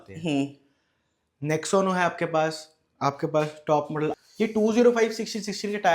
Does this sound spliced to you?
yes; 1 cut; at 4.2 s

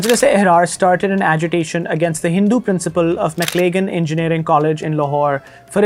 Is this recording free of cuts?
yes; 0 cuts

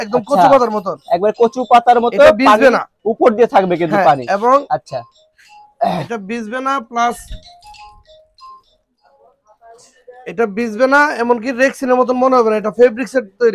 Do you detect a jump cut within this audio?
no; 0 cuts

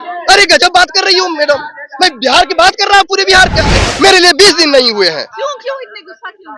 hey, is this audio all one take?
no; 1 cut; at 3.9 s

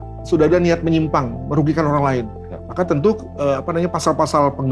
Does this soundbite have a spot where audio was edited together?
no; 0 cuts

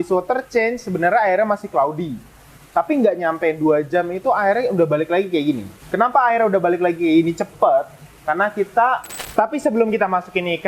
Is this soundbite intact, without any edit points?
no; 1 cut; at 9.2 s

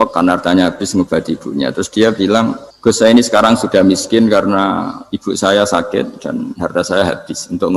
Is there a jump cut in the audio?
yes; 1 cut; at 2.7 s

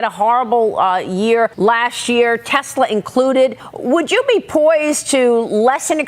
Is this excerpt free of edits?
no; 2 cuts; at 1.5 s, 3.7 s

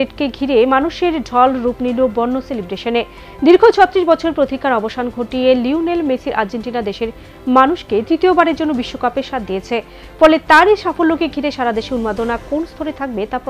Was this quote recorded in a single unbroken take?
yes; 0 cuts

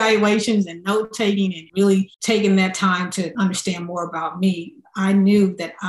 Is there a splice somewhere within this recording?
yes; 3 cuts; at 1.6 s, 2.1 s, 3.3 s

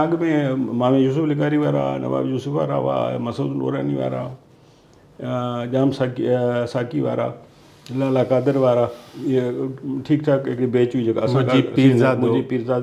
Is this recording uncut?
yes; 0 cuts

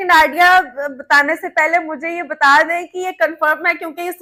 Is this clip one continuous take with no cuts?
yes; 0 cuts

